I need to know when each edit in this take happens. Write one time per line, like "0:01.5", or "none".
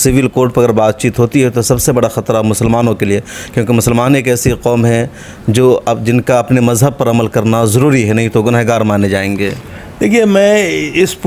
none